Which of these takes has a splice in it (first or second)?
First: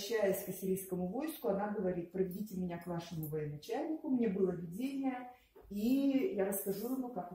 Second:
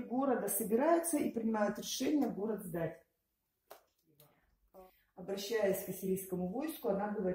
second